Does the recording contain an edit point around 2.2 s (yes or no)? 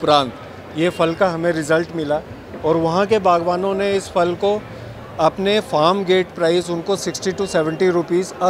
no